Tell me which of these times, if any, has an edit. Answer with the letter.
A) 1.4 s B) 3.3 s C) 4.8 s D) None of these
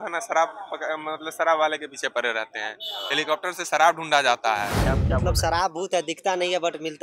C